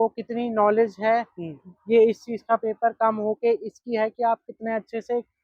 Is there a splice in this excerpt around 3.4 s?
no; 0 cuts

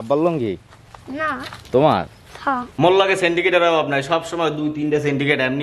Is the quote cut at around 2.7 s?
yes; 1 cut; at 2.7 s

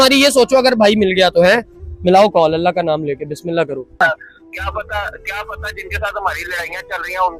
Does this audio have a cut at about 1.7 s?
no; 1 cut; at 4.0 s

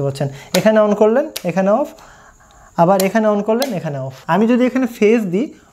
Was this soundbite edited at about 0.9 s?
no; 1 cut; at 4.2 s

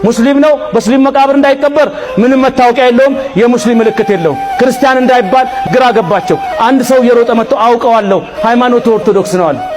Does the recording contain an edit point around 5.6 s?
yes; 1 cut; at 5.6 s

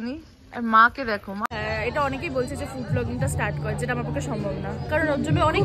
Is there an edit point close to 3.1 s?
no; 1 cut; at 1.4 s

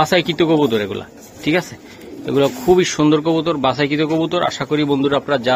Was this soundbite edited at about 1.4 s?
no; 0 cuts

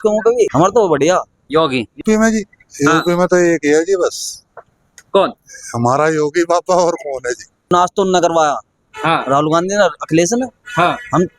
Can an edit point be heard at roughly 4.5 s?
no; 2 cuts; at 2.0 s, 7.7 s

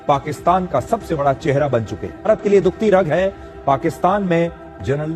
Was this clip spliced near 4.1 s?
no; 1 cut; at 2.3 s

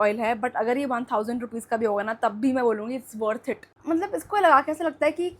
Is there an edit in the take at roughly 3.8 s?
yes; 1 cut; at 3.8 s

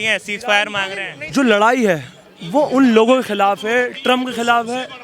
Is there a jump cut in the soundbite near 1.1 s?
yes; 1 cut; at 1.1 s

